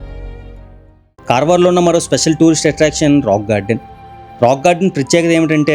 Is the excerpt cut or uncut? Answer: cut